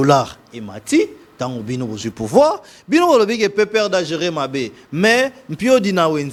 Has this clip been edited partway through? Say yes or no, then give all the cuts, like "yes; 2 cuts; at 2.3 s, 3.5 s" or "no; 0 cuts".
no; 0 cuts